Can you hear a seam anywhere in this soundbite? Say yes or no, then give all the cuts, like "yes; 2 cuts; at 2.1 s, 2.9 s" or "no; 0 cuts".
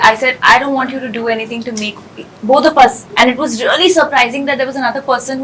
no; 0 cuts